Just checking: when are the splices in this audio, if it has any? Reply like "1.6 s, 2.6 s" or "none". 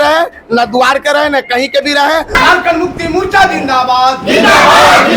2.4 s